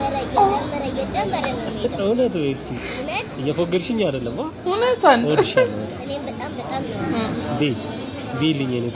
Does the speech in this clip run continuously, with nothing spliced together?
yes; 0 cuts

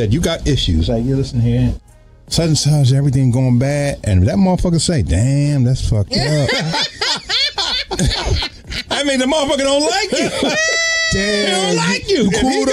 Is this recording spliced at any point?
no; 0 cuts

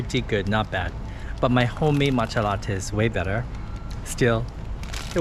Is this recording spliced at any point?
no; 0 cuts

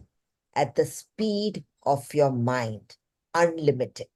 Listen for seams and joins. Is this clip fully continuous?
yes; 0 cuts

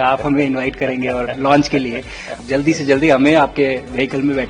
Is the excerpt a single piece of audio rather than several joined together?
no; 1 cut; at 2.4 s

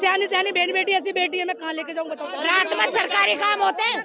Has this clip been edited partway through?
yes; 1 cut; at 2.3 s

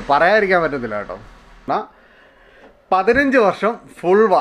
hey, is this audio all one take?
no; 1 cut; at 1.7 s

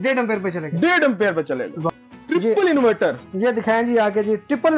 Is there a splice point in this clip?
no; 0 cuts

